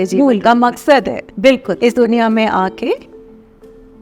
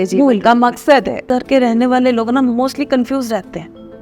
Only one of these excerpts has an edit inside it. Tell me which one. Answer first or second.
second